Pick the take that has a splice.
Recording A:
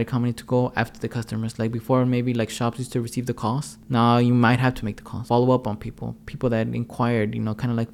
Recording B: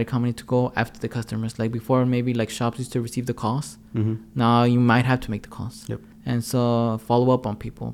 A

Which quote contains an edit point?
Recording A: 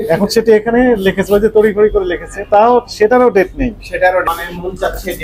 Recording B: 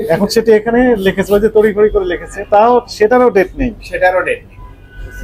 A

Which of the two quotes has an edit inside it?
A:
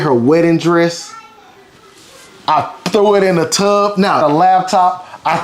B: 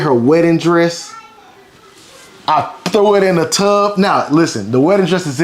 A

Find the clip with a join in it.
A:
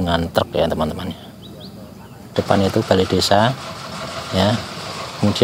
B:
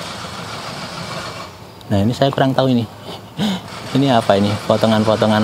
A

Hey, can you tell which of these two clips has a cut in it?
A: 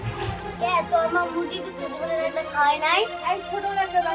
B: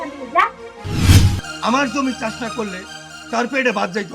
B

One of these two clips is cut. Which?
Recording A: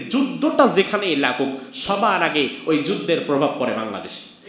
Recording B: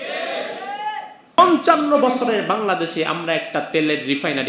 B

